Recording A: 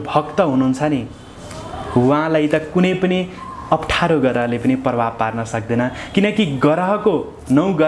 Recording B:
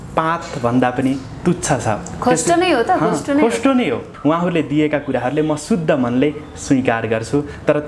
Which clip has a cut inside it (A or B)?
B